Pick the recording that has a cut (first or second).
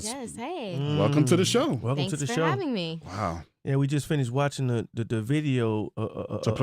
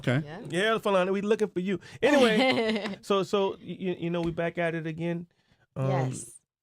first